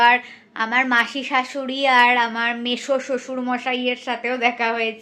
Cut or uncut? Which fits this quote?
uncut